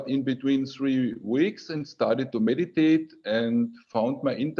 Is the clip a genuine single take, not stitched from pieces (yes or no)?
yes